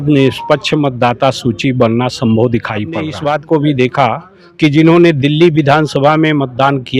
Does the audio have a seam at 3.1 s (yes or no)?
yes